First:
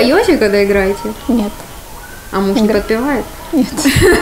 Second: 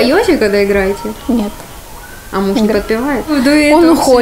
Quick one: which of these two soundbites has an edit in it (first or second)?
second